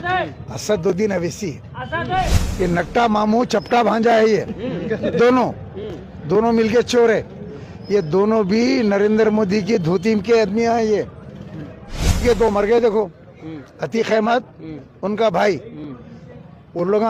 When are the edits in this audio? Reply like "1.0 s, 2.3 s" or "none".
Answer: 2.4 s, 12.2 s